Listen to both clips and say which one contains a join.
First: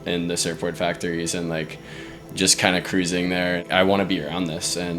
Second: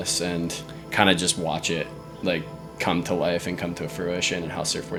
first; 1 cut; at 3.6 s

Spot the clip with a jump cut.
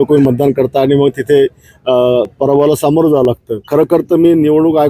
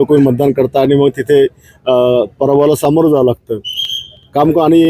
first; 1 cut; at 3.5 s

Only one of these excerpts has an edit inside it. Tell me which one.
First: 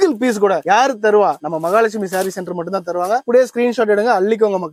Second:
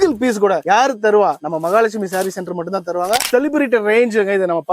second; 1 cut; at 3.3 s

